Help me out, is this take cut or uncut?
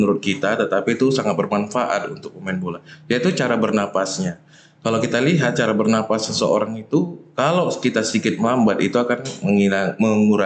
uncut